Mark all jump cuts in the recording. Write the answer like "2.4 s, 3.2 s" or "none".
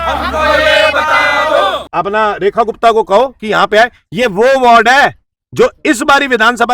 1.8 s